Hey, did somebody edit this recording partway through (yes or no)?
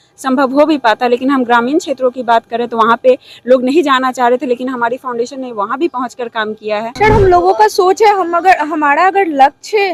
yes